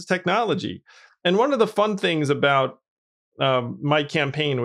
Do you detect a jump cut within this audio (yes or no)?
no